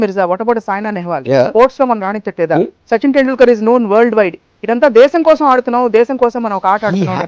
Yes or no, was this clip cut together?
no